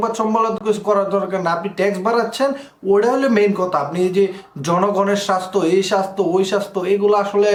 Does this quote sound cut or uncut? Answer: uncut